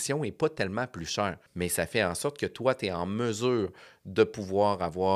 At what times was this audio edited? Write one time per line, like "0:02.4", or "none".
0:01.4